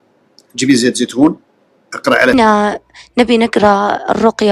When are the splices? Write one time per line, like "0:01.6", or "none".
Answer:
0:02.3

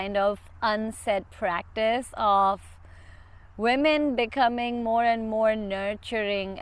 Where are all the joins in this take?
none

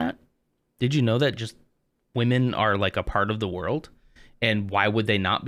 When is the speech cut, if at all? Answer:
none

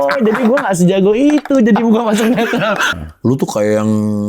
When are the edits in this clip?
0:02.9

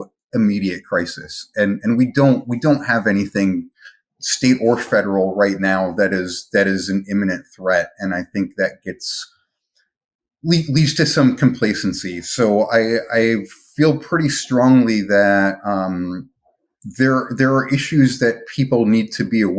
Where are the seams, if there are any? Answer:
0:16.3

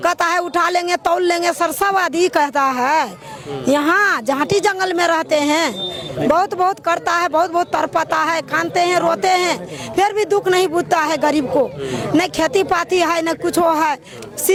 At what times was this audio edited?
none

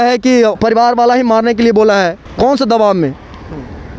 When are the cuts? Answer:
0:02.2

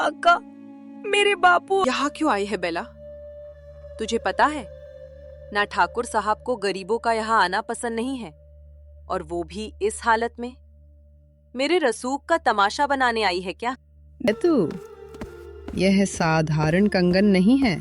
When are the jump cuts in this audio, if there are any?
0:01.8
0:14.3

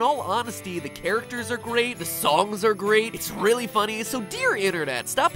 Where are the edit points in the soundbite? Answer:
0:03.7

